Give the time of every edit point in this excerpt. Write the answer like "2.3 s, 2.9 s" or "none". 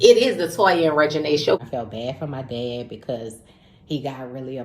1.6 s